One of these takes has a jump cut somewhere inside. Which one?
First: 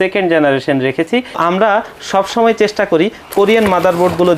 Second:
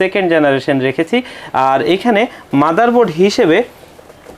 first; 1 cut; at 1.4 s

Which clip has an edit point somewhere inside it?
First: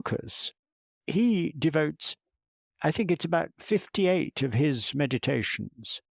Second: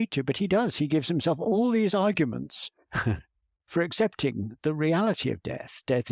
first; 1 cut; at 0.9 s

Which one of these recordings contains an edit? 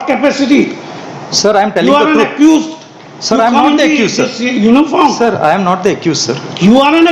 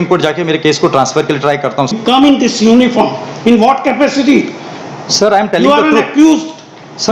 second; 1 cut; at 1.9 s

